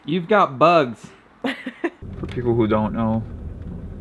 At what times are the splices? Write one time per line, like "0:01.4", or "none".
0:02.0